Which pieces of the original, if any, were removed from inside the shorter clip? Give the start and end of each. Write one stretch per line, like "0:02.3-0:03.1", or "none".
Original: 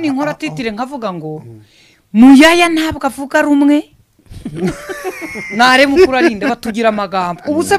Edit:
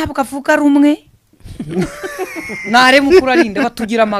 none